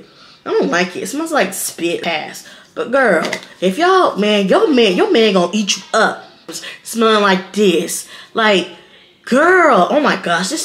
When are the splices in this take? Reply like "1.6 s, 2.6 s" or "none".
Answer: 2.0 s, 6.5 s

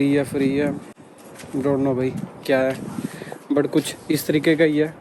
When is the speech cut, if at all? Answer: none

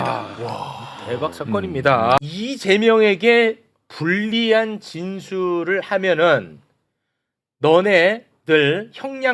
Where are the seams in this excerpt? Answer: 2.2 s

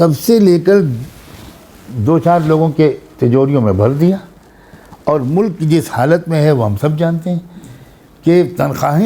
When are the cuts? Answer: none

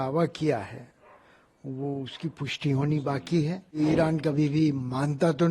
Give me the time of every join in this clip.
3.8 s

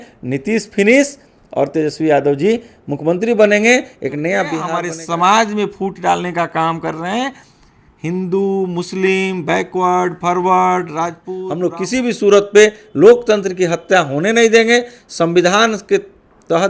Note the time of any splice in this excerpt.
4.7 s, 11.3 s

